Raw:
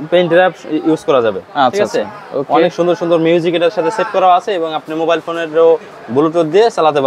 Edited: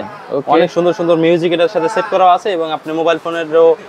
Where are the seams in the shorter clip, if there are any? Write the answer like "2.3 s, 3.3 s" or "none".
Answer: none